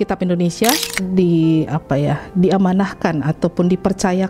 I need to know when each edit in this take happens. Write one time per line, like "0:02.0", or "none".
0:00.9